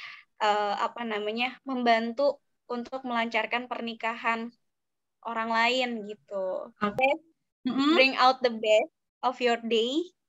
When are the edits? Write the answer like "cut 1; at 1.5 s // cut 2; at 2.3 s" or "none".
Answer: cut 1; at 7.0 s